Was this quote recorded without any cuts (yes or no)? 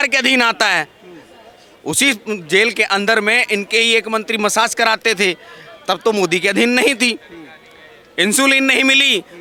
yes